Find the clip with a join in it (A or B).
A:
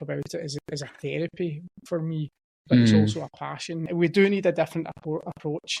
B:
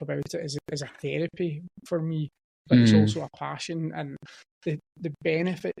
A